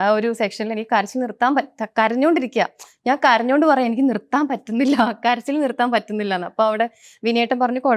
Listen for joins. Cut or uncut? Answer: uncut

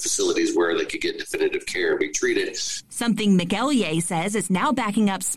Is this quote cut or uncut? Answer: cut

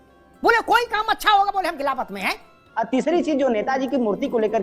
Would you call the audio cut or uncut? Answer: cut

